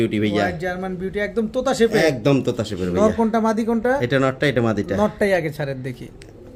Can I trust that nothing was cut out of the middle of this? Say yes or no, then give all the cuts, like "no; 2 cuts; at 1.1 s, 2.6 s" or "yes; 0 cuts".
yes; 0 cuts